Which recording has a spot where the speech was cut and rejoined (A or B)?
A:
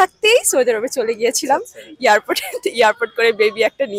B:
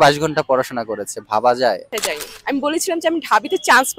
B